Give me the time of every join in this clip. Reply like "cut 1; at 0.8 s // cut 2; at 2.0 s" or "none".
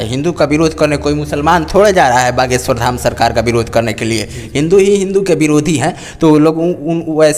none